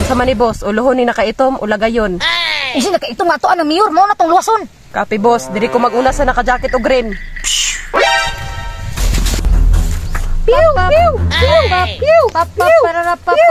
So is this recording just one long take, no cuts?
no; 1 cut; at 9.5 s

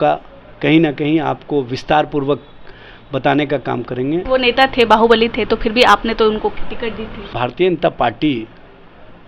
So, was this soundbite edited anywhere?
yes; 2 cuts; at 4.2 s, 7.3 s

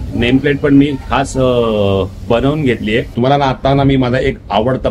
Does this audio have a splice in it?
yes; 1 cut; at 3.1 s

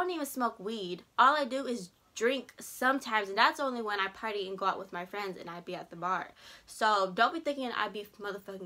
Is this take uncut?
yes; 0 cuts

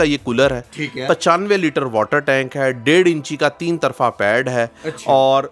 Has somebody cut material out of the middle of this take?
no; 0 cuts

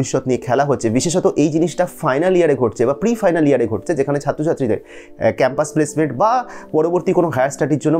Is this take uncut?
yes; 0 cuts

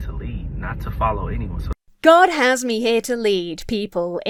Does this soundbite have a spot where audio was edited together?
no; 0 cuts

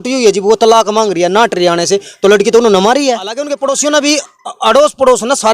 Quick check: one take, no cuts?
no; 1 cut; at 3.5 s

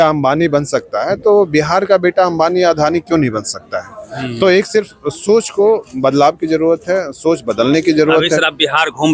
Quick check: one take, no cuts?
yes; 0 cuts

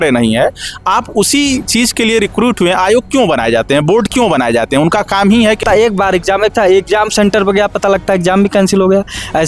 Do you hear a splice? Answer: yes; 1 cut; at 5.6 s

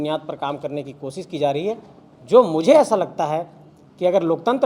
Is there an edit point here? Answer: no; 0 cuts

